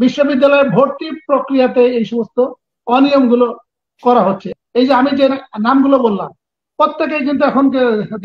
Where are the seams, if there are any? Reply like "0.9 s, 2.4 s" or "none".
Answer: 4.5 s